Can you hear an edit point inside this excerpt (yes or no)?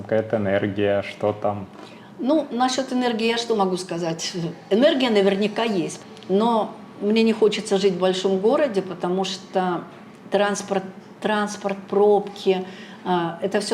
yes